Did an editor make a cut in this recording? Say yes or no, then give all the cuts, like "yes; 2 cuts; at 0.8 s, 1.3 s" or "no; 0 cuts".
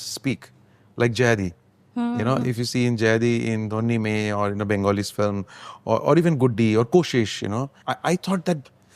no; 0 cuts